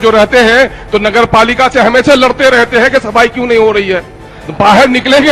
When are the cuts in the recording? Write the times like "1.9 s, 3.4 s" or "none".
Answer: none

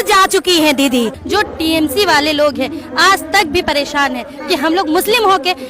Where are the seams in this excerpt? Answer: 1.2 s

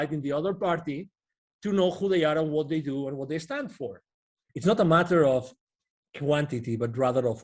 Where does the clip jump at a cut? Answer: 4.4 s

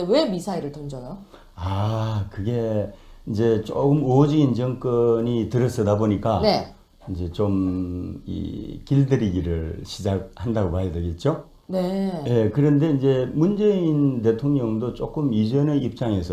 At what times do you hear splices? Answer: 6.7 s

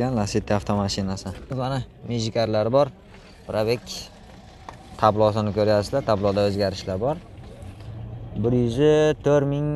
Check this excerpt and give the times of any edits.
1.5 s

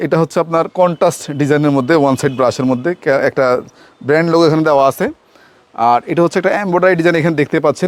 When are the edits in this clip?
none

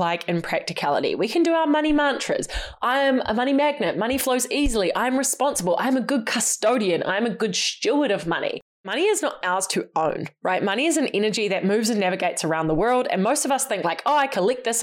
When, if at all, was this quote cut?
8.9 s

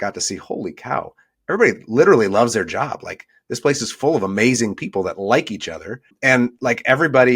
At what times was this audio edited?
6.1 s

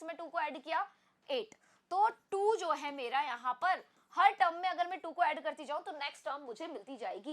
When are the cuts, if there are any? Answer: none

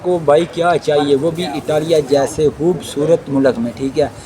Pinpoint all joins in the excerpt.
2.5 s

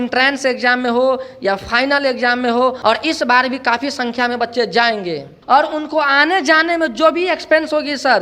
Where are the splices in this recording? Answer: 2.8 s, 5.3 s

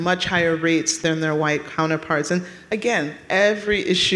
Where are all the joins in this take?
0.9 s

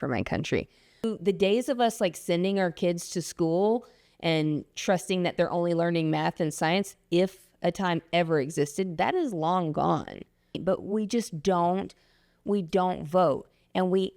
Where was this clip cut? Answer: 1.0 s, 10.6 s

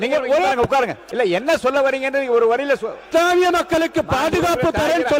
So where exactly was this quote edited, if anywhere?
1.0 s, 2.9 s

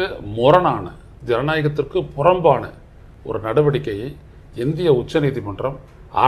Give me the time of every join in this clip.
none

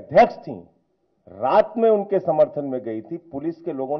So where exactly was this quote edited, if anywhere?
none

